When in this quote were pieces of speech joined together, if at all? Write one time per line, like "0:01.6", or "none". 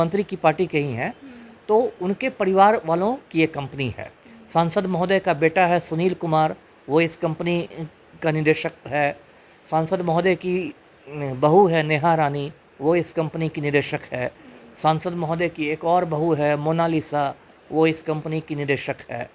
none